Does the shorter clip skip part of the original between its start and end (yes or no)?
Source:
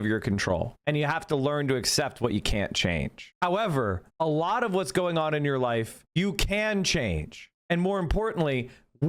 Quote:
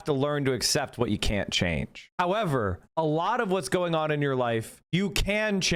no